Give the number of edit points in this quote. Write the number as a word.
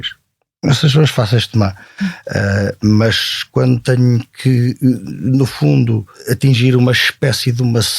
one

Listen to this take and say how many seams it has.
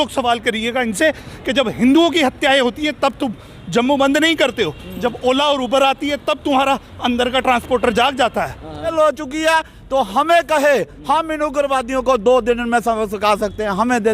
one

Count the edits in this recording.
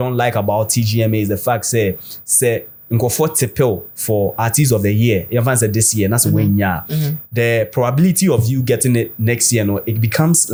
zero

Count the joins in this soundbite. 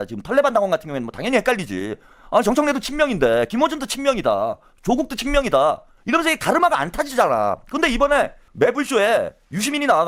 zero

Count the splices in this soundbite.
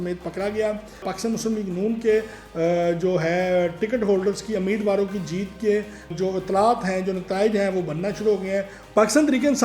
two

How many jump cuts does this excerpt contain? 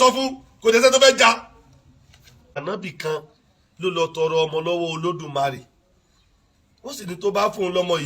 one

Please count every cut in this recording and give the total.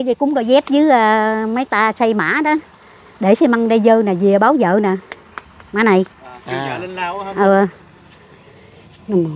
zero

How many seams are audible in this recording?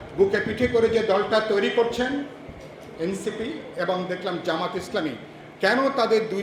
zero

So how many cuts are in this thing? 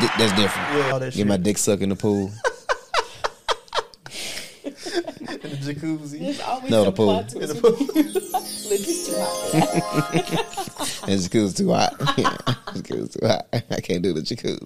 one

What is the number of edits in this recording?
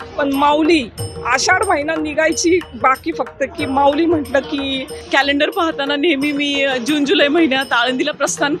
one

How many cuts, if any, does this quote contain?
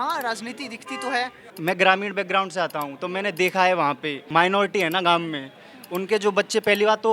two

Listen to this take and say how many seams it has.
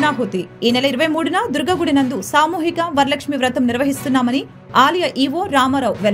zero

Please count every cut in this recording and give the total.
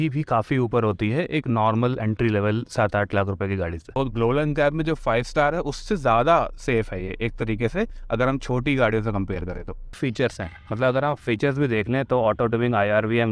two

